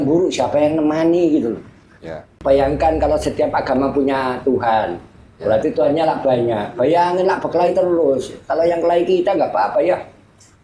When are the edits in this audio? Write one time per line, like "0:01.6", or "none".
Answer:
0:02.3